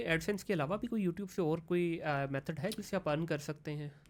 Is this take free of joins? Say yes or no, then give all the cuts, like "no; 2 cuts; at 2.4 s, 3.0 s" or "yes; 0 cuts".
yes; 0 cuts